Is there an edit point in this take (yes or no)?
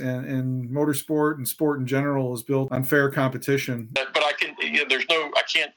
yes